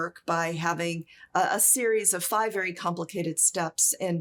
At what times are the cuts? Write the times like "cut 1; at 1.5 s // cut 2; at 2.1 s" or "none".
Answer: none